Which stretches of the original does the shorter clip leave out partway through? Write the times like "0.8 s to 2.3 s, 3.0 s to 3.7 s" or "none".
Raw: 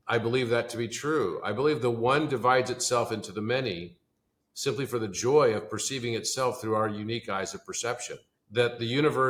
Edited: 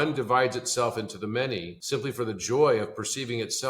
3.9 s to 4.5 s